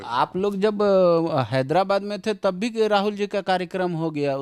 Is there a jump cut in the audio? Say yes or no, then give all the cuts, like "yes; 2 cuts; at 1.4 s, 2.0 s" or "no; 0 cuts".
no; 0 cuts